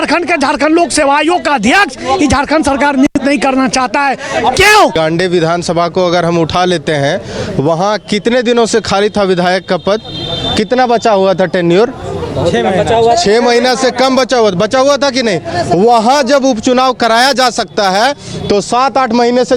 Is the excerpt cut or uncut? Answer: cut